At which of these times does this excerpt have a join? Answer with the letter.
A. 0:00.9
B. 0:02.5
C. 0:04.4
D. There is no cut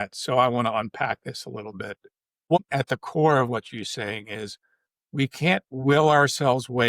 B